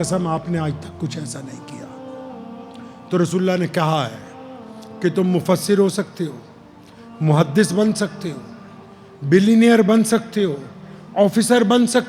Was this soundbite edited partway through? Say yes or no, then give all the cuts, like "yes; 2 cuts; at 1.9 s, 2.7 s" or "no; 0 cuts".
yes; 2 cuts; at 1.6 s, 2.9 s